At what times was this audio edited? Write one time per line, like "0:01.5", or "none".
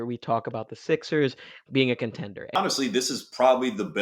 0:02.6